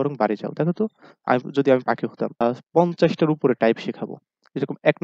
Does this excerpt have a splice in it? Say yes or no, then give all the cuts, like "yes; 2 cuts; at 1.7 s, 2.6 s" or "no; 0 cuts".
yes; 1 cut; at 2.4 s